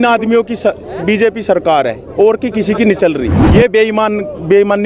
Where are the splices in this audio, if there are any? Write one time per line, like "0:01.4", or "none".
0:03.4